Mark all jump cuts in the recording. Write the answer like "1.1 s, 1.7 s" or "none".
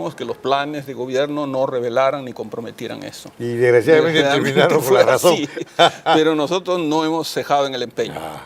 4.5 s